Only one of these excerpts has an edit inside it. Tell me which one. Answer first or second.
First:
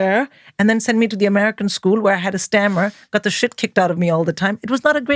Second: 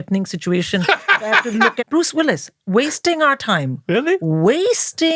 second